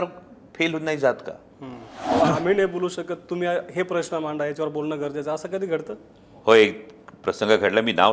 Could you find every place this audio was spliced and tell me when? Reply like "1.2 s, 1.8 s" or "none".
2.2 s